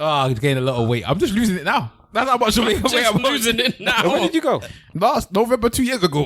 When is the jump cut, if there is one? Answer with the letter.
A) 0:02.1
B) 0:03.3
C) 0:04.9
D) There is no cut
C